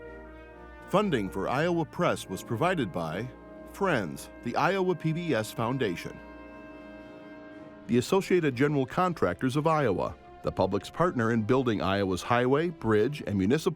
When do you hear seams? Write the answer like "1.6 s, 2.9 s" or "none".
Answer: 0.9 s